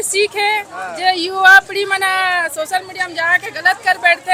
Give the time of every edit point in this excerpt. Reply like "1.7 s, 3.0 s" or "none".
none